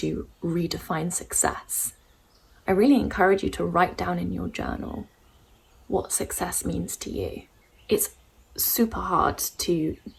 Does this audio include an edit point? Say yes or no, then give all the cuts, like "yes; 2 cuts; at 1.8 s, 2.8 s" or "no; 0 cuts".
no; 0 cuts